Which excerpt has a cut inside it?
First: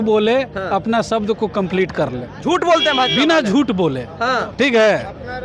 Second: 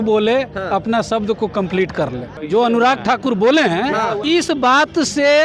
second; 2 cuts; at 2.3 s, 4.2 s

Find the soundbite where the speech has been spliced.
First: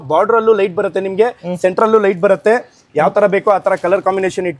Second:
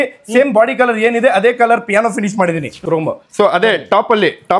second; 1 cut; at 2.7 s

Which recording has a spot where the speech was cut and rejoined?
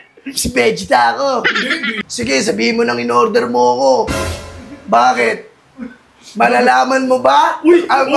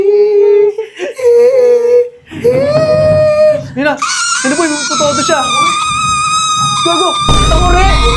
first; 1 cut; at 1.9 s

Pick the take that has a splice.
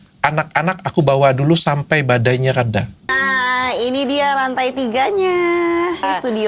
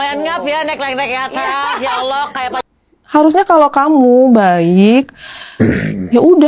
second; 1 cut; at 2.6 s

